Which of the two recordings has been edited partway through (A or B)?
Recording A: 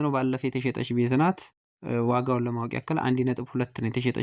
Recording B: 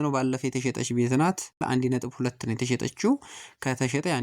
B